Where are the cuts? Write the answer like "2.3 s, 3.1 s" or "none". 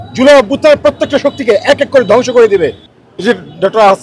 2.8 s